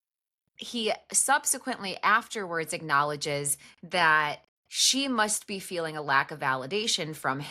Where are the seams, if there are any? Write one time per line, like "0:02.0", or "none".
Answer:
none